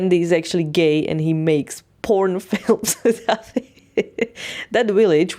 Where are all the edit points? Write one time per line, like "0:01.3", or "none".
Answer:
none